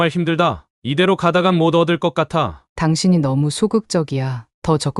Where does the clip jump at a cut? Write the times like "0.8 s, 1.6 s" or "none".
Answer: 2.6 s